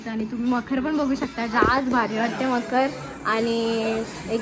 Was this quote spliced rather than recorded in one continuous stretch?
no; 0 cuts

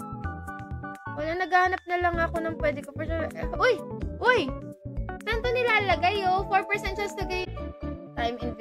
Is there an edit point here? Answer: yes; 1 cut; at 7.4 s

